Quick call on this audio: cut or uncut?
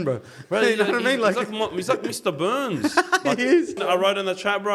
cut